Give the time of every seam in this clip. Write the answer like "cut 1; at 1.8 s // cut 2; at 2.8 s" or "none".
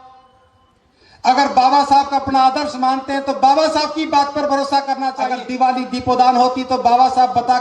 cut 1; at 5.3 s